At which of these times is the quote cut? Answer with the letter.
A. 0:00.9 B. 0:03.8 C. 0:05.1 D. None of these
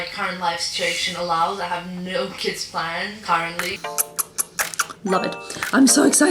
B